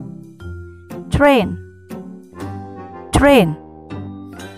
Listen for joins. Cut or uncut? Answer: cut